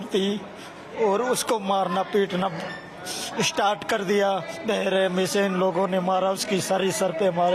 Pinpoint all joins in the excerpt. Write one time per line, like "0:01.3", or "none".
none